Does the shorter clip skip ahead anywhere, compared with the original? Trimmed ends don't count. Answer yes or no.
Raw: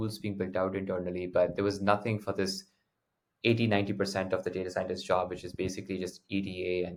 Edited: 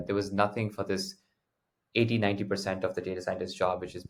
no